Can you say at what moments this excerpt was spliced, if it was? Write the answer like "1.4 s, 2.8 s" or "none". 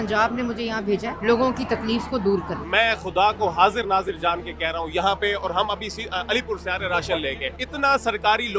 1.1 s, 2.6 s, 7.5 s